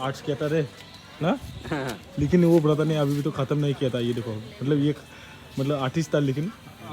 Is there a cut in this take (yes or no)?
no